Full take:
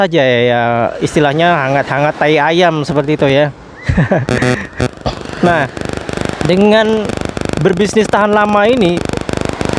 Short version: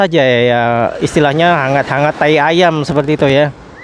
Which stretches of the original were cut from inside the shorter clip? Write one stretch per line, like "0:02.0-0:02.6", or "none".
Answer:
none